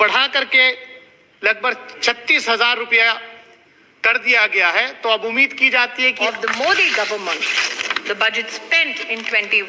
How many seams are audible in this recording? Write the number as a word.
one